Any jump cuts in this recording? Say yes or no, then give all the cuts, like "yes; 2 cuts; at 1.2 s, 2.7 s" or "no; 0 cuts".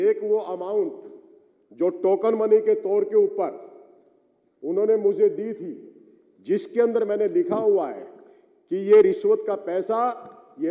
no; 0 cuts